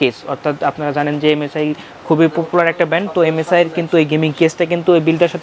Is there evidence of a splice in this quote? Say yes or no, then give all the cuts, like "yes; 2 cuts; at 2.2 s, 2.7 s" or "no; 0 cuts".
no; 0 cuts